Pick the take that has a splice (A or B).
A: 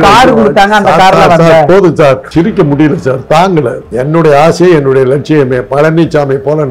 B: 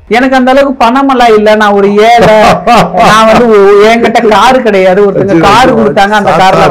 A